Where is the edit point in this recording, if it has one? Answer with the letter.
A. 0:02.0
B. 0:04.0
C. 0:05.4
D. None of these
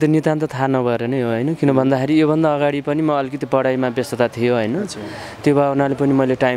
D